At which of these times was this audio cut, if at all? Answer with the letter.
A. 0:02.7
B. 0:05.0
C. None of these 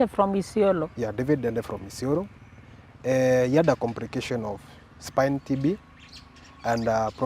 A